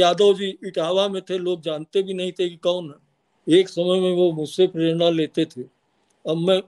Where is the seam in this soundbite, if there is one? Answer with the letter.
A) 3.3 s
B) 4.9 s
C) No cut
A